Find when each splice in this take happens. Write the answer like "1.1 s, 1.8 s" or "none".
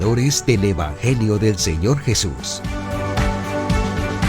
2.4 s